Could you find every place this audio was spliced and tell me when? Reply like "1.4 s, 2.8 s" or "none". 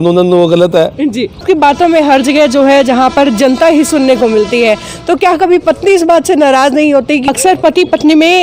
1.4 s, 7.2 s

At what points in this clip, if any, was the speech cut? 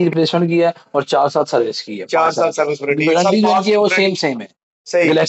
none

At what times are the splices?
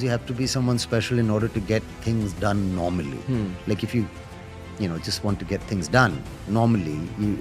none

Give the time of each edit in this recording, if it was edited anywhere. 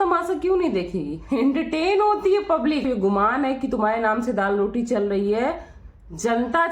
2.9 s

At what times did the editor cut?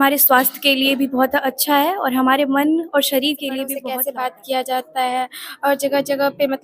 3.7 s

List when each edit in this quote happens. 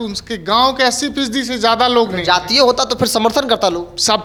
none

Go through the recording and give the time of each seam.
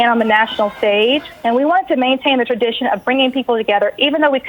1.3 s

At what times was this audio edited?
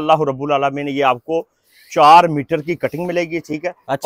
none

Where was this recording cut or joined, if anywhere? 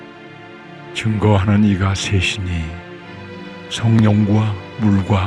1.0 s

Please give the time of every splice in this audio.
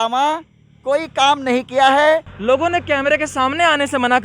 2.3 s

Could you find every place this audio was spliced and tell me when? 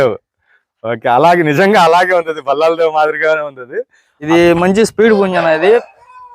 4.1 s

